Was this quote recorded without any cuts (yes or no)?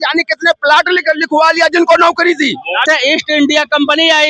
no